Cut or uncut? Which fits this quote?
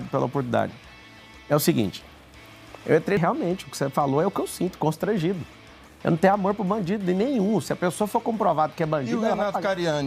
cut